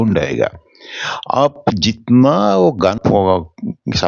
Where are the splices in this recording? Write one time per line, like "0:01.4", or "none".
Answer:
0:03.0